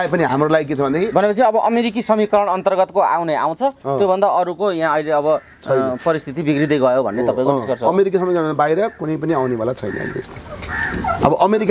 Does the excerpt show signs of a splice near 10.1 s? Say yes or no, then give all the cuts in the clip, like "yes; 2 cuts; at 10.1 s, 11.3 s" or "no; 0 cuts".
no; 0 cuts